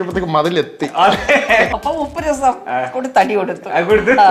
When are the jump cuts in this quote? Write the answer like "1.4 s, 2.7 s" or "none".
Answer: 1.7 s